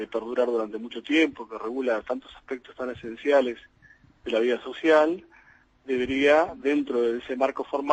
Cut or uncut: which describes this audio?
cut